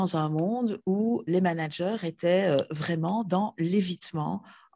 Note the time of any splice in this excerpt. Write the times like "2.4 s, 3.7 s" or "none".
none